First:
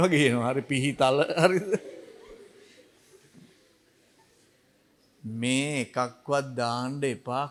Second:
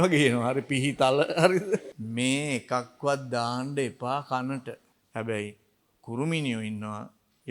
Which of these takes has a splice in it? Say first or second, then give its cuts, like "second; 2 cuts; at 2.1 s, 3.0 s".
second; 2 cuts; at 1.9 s, 4.9 s